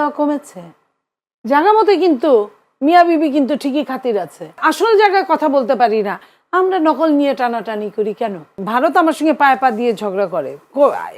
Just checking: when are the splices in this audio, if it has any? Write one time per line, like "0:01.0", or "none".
0:04.6
0:08.6